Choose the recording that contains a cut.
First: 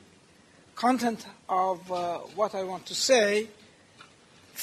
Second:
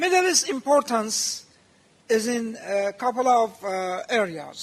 first; 1 cut; at 1.3 s

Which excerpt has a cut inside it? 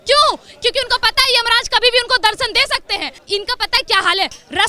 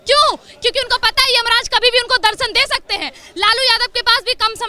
first; 1 cut; at 3.1 s

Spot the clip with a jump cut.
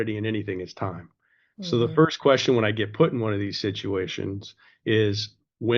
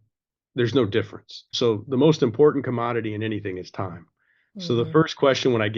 second; 1 cut; at 1.4 s

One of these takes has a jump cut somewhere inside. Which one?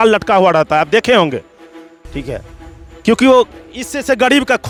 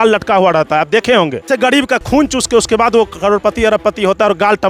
second; 1 cut; at 1.4 s

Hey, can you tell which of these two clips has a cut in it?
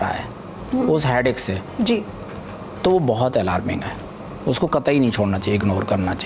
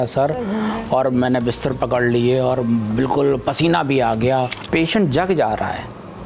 second; 1 cut; at 4.6 s

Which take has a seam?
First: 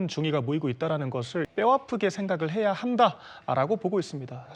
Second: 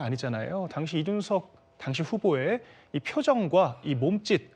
first; 1 cut; at 1.5 s

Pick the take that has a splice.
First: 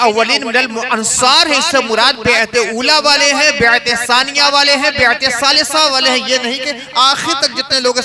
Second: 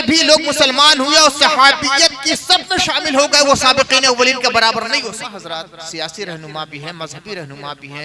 second; 1 cut; at 5.2 s

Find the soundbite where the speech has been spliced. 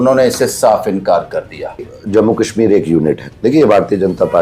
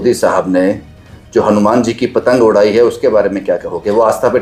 first; 1 cut; at 1.9 s

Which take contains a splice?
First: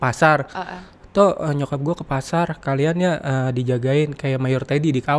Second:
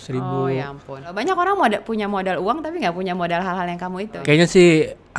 second; 2 cuts; at 1.1 s, 4.2 s

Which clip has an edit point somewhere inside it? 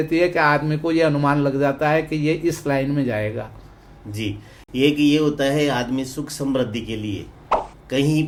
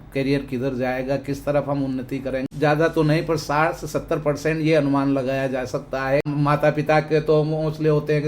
second; 2 cuts; at 2.5 s, 6.3 s

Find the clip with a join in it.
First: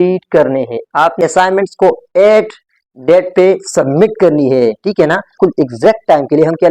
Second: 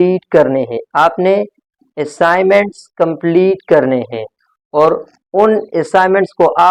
first; 2 cuts; at 1.2 s, 5.3 s

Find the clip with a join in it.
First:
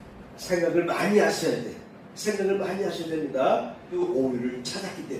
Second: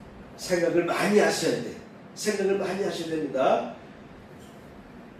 first; 1 cut; at 3.8 s

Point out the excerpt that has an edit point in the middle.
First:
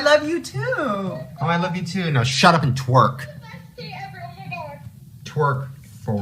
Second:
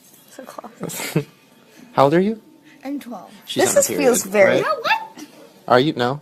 first; 1 cut; at 5.2 s

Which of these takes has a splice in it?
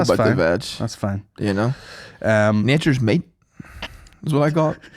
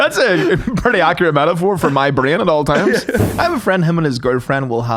second; 1 cut; at 3.3 s

